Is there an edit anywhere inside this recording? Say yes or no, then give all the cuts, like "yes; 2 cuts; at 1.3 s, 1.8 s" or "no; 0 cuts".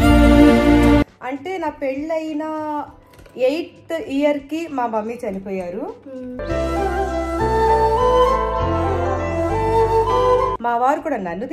yes; 3 cuts; at 1.0 s, 6.3 s, 10.6 s